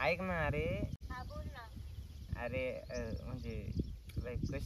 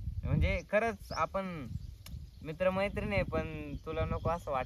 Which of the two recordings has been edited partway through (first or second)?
first